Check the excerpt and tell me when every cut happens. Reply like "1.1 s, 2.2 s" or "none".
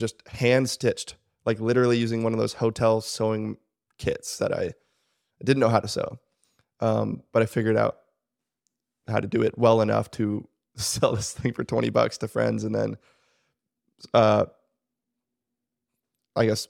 none